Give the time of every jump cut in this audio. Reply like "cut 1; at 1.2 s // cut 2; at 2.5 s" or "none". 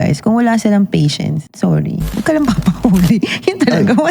cut 1; at 1.5 s // cut 2; at 2.1 s